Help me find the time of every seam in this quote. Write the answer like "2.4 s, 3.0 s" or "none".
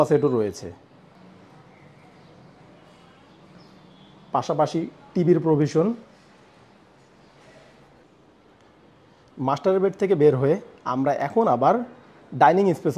none